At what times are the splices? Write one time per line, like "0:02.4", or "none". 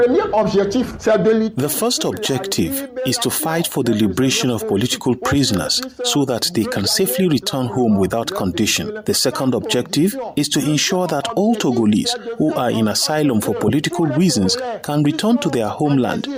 none